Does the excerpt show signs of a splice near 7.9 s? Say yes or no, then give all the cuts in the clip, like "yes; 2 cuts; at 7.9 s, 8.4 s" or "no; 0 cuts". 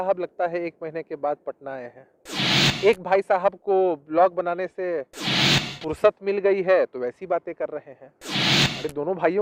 no; 0 cuts